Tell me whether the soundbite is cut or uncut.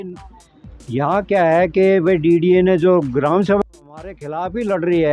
cut